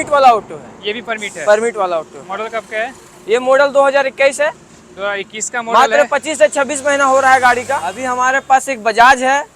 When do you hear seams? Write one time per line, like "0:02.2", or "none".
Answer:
0:08.0